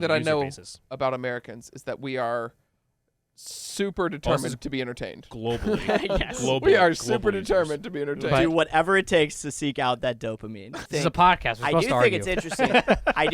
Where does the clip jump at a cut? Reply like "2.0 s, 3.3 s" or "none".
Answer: 10.8 s